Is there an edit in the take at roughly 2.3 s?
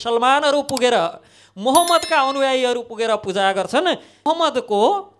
no; 1 cut; at 4.1 s

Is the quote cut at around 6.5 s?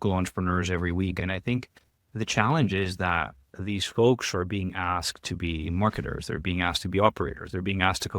no; 1 cut; at 1.2 s

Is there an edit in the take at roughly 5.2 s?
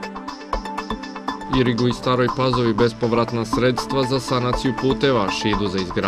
no; 1 cut; at 1.1 s

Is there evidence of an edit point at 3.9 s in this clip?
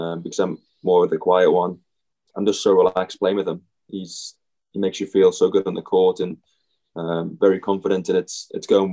no; 1 cut; at 2.3 s

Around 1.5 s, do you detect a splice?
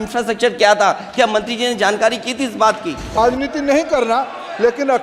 no; 1 cut; at 3.2 s

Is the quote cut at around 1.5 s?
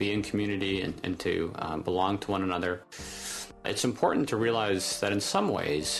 no; 1 cut; at 3.6 s

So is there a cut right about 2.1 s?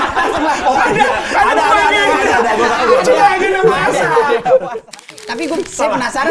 no; 1 cut; at 4.9 s

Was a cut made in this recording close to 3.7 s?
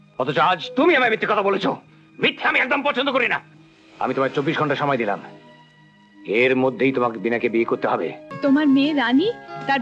no; 1 cut; at 8.2 s

